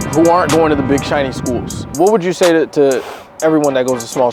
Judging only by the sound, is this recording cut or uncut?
cut